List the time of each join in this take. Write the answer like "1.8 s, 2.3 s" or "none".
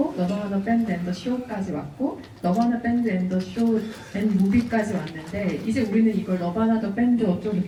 none